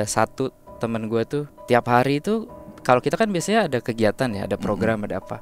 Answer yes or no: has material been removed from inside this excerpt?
yes